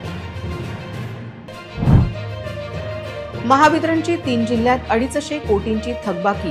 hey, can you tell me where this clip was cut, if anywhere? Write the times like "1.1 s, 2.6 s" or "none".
none